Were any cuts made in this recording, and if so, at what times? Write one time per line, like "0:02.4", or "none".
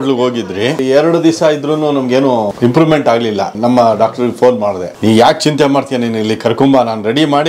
0:00.8
0:02.5
0:03.5
0:04.9